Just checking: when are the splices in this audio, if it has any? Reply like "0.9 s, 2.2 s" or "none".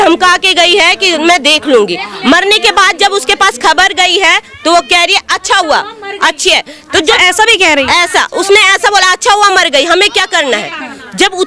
none